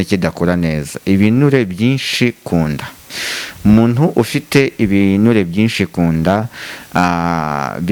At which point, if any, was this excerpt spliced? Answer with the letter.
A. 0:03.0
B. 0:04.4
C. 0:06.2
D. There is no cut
D